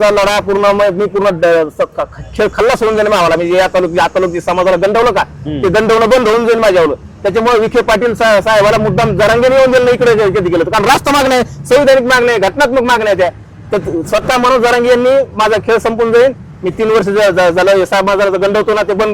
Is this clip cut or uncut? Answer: uncut